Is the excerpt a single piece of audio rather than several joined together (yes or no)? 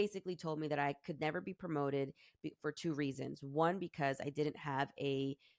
yes